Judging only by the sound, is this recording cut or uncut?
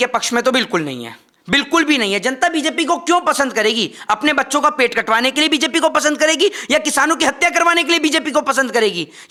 uncut